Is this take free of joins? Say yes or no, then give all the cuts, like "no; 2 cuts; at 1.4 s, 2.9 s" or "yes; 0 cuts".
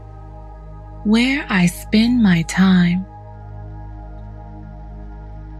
yes; 0 cuts